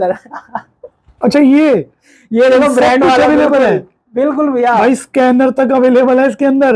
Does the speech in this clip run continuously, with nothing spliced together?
yes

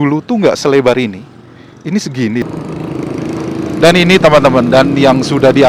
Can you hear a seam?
yes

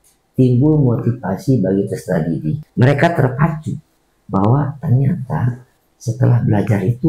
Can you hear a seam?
yes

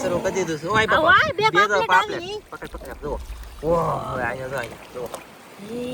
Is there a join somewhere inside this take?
no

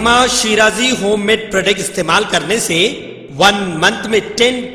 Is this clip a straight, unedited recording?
yes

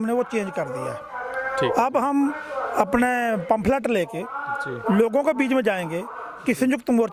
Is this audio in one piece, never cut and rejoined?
yes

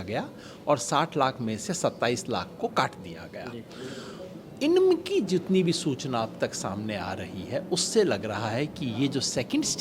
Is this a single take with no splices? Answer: yes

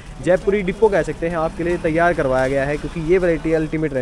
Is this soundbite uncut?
yes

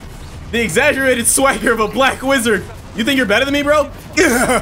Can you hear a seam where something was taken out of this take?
yes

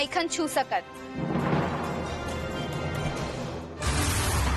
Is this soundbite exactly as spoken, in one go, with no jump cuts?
yes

